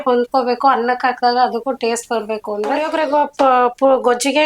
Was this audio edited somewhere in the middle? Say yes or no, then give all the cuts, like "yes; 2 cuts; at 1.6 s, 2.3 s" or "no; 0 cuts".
yes; 1 cut; at 2.9 s